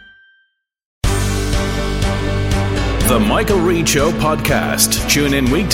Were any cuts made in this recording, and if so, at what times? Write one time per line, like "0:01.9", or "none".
0:00.9